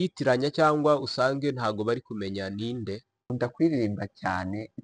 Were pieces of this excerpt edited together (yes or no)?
yes